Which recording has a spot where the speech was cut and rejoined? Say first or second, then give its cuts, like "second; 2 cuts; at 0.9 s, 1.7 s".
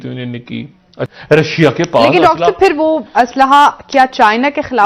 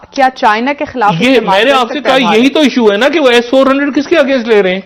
first; 1 cut; at 1.0 s